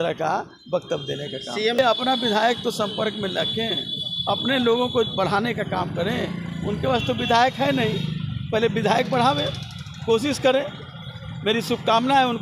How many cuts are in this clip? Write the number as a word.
one